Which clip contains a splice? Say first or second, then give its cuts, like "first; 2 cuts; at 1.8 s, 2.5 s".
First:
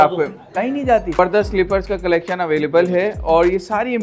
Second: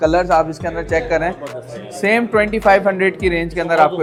first; 1 cut; at 1.2 s